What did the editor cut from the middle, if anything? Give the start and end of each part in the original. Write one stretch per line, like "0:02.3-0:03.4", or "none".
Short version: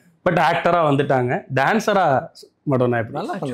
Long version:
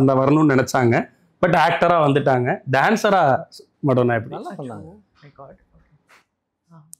none